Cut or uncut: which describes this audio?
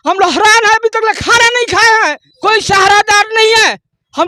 cut